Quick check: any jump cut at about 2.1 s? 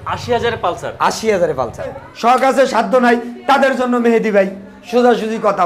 yes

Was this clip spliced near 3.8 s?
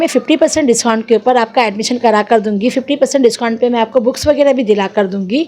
no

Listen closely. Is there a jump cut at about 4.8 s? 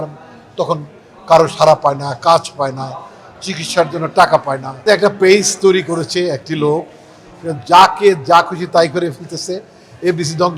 yes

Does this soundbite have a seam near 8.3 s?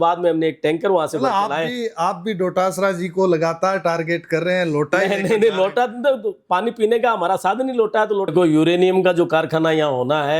yes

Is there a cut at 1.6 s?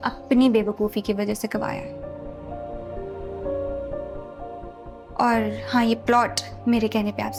no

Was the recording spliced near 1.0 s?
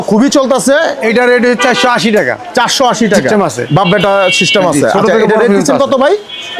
yes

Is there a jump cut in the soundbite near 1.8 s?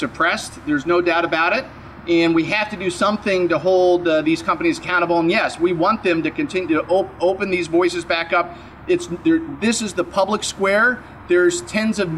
no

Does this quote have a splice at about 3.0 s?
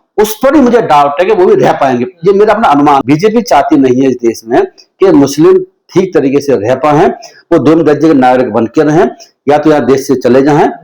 yes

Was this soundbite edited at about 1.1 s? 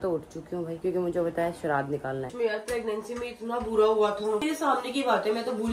no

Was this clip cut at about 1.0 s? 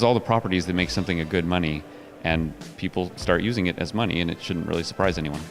no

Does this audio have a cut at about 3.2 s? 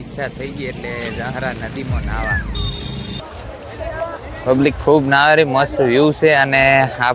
yes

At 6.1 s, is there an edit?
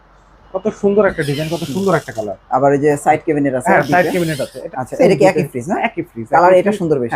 no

